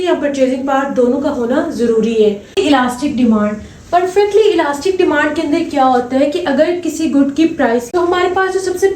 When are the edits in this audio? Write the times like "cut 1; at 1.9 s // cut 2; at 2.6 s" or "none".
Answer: cut 1; at 2.6 s // cut 2; at 7.9 s